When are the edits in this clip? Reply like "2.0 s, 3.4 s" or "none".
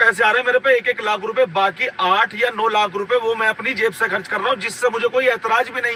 none